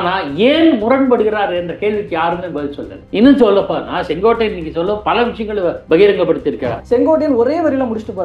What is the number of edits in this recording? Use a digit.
1